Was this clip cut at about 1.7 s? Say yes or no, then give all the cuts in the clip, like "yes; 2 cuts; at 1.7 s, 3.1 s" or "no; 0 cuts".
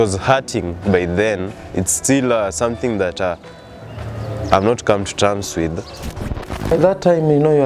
no; 1 cut; at 6.0 s